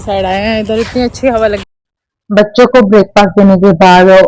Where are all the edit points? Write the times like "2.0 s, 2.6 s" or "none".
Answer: 1.7 s

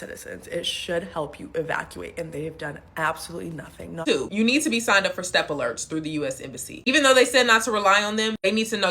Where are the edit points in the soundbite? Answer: 4.0 s

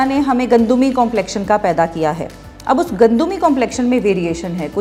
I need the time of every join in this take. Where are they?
none

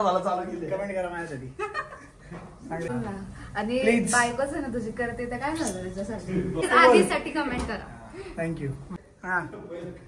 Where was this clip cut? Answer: 2.9 s, 6.6 s, 8.9 s

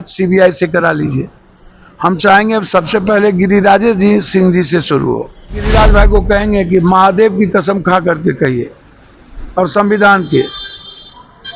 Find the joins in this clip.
5.7 s

